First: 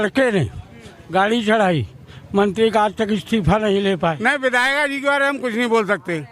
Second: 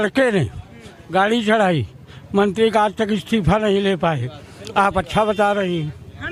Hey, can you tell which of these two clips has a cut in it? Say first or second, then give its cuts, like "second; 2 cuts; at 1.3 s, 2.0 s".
first; 1 cut; at 4.2 s